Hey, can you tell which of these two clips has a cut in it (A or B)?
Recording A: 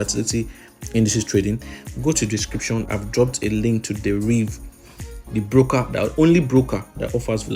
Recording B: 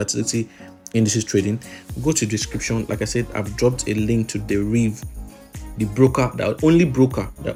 A